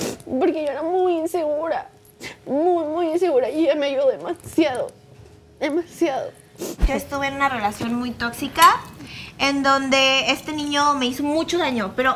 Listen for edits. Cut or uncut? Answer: cut